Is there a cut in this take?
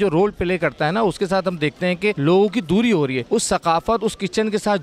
yes; 2 cuts; at 2.2 s, 3.2 s

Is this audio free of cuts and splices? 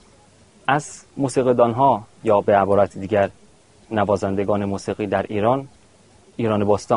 yes; 0 cuts

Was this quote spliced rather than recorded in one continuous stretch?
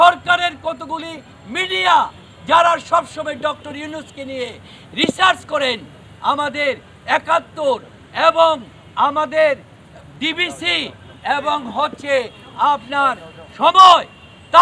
no; 0 cuts

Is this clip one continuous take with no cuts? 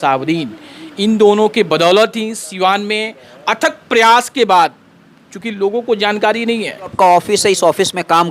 no; 1 cut; at 6.9 s

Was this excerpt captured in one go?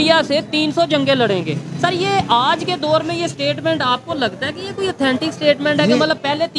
yes; 0 cuts

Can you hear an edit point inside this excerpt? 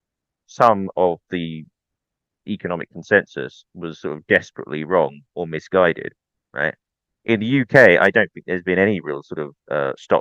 no; 0 cuts

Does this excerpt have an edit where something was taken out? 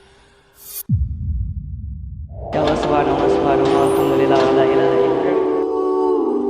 no; 0 cuts

